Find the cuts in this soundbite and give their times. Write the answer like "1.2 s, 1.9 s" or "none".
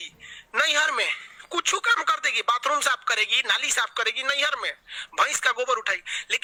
none